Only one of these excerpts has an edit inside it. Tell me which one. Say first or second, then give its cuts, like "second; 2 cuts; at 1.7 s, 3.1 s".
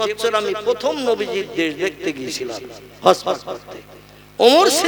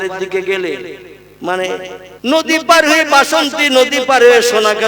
second; 1 cut; at 2.0 s